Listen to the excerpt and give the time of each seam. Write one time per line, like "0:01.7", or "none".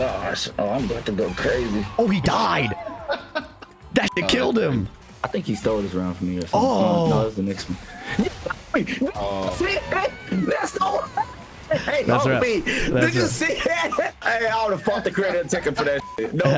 0:05.0
0:14.1